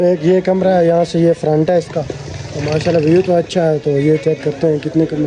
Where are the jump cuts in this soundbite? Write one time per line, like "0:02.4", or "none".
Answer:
none